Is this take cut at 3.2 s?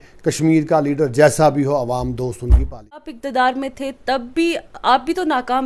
yes; 1 cut; at 3.2 s

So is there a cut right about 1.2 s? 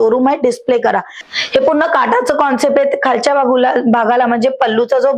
yes; 1 cut; at 1.2 s

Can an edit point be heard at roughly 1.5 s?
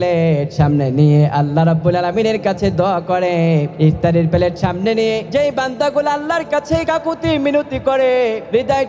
no; 2 cuts; at 3.7 s, 5.2 s

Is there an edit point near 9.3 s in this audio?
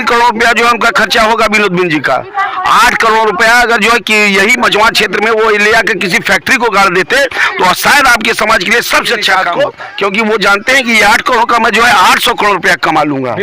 yes; 1 cut; at 9.3 s

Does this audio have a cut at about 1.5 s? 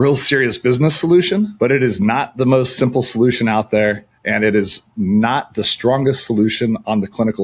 yes; 1 cut; at 1.5 s

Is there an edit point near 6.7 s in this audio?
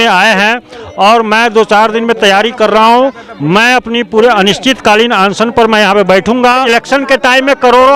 yes; 1 cut; at 6.7 s

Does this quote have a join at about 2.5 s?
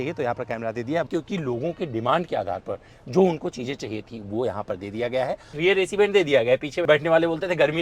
no; 3 cuts; at 1.1 s, 5.6 s, 6.7 s

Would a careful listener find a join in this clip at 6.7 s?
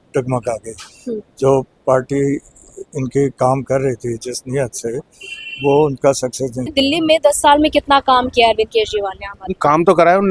yes; 1 cut; at 6.7 s

